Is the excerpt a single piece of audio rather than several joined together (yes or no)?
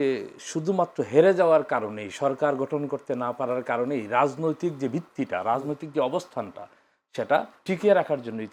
yes